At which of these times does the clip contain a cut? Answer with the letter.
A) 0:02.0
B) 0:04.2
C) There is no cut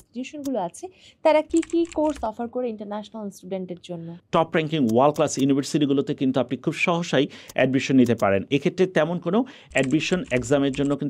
B